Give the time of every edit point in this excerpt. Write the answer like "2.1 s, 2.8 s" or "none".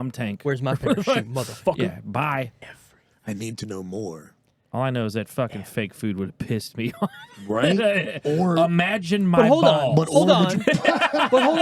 2.6 s

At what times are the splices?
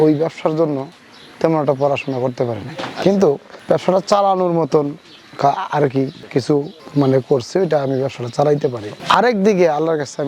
8.9 s

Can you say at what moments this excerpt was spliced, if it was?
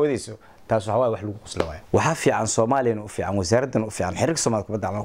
1.8 s

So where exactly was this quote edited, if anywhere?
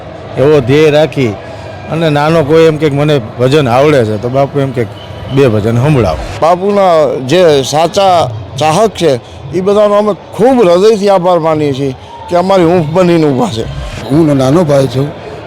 6.3 s, 14.0 s

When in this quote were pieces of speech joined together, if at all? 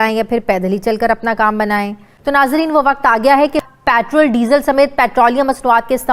2.0 s, 3.6 s

